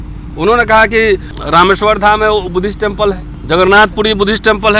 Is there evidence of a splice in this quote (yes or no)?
yes